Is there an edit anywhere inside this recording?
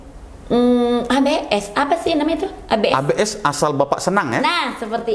no; 0 cuts

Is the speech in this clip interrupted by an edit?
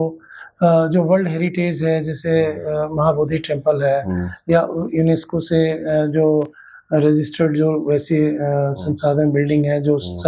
no; 0 cuts

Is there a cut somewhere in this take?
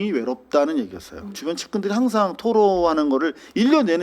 yes; 1 cut; at 1.3 s

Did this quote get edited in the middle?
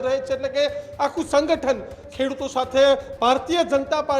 yes; 1 cut; at 2.0 s

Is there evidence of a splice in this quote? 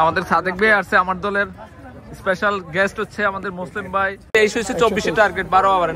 yes; 1 cut; at 4.2 s

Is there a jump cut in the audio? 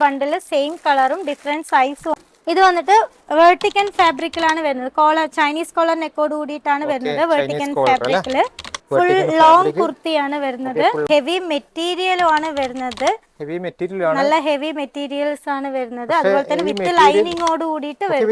yes; 2 cuts; at 2.1 s, 11.1 s

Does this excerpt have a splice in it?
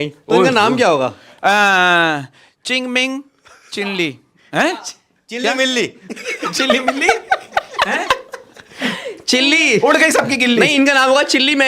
no; 0 cuts

